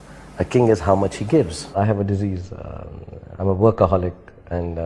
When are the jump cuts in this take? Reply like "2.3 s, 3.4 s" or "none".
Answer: 1.8 s